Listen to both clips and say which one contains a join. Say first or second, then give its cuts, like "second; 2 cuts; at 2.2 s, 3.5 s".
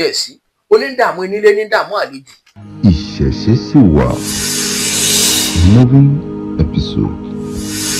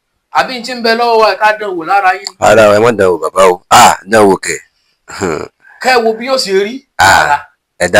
first; 1 cut; at 2.7 s